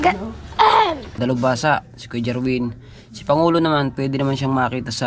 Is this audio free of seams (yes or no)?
no